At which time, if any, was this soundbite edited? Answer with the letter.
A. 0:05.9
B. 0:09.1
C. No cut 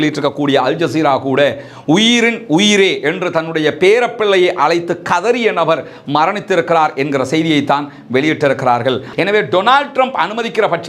B